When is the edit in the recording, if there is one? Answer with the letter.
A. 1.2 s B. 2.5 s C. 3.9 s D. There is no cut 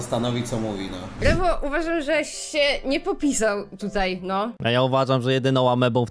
A